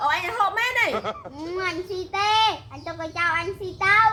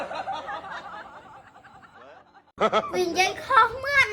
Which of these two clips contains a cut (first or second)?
second